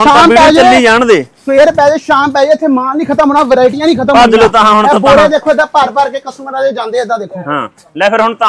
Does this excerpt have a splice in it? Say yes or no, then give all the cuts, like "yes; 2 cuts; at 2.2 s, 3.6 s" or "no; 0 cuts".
no; 0 cuts